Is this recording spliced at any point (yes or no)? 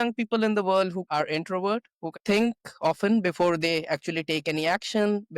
yes